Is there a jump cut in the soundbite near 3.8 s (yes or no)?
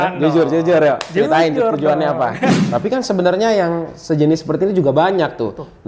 no